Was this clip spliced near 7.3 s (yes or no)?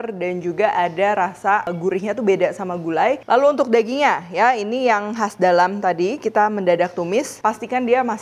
yes